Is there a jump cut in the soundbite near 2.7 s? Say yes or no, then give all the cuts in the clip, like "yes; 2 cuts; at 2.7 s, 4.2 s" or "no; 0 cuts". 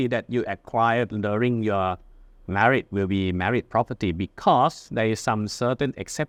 no; 0 cuts